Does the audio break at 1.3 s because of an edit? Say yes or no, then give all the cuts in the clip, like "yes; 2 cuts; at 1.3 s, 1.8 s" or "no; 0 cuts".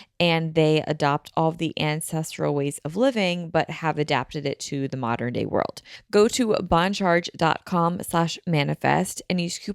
no; 1 cut; at 5.9 s